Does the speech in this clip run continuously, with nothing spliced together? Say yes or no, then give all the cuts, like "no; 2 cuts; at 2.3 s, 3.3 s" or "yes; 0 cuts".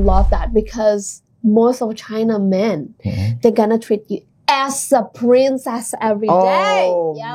yes; 0 cuts